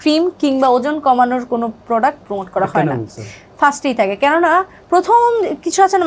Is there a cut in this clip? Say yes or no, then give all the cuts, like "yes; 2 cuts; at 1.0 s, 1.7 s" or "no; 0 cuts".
no; 0 cuts